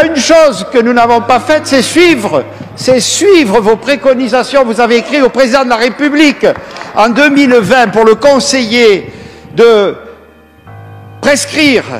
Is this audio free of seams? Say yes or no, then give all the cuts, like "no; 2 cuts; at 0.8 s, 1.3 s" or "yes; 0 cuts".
yes; 0 cuts